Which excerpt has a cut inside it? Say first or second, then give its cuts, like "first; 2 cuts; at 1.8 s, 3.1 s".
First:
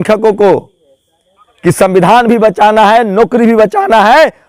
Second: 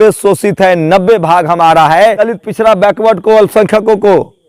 second; 1 cut; at 2.2 s